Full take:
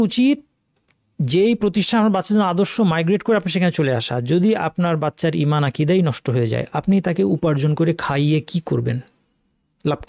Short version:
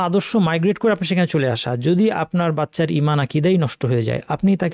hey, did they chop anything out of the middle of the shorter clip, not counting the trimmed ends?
no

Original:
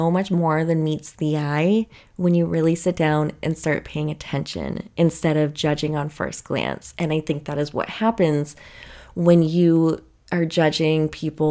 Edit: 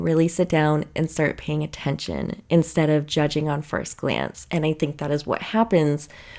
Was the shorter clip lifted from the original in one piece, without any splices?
yes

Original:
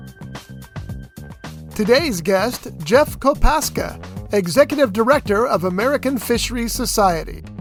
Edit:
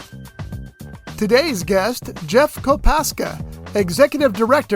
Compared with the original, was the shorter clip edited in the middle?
yes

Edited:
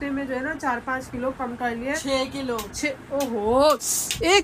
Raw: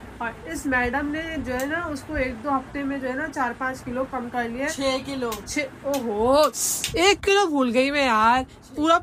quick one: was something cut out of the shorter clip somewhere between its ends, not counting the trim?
no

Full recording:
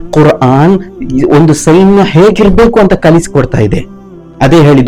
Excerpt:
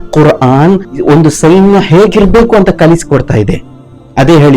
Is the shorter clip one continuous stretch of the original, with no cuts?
no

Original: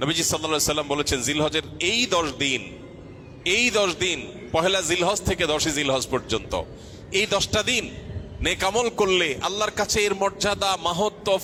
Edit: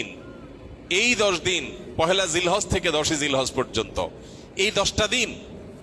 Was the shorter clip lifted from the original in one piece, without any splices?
yes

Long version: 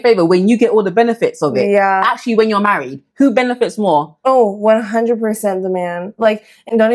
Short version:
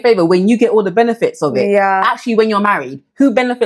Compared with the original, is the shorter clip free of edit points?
yes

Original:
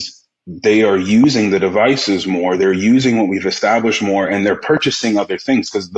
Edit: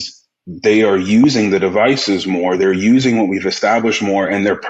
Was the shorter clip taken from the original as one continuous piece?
yes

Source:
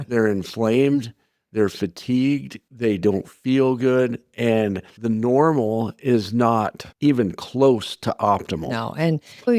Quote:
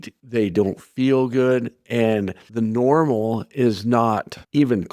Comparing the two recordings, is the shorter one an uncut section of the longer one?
yes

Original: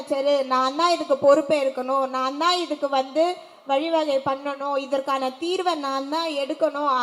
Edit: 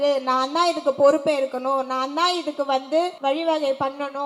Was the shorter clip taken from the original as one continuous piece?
no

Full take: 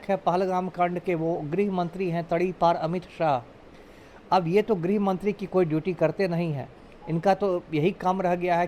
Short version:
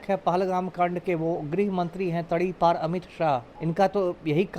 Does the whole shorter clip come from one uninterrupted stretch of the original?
no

